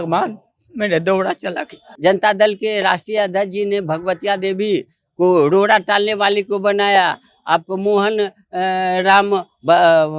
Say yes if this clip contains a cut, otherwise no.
yes